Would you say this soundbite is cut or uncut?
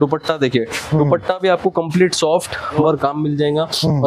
cut